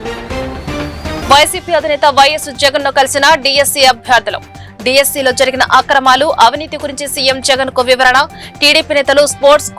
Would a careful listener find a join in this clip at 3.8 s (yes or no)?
no